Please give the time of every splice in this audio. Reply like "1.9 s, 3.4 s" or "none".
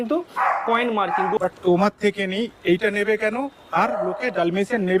1.4 s